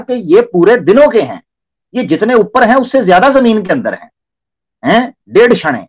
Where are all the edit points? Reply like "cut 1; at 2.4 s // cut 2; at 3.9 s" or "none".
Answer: none